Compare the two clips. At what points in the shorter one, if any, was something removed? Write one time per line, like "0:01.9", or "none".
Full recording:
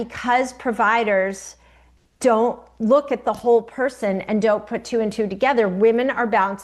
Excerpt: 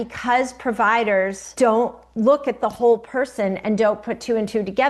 0:01.4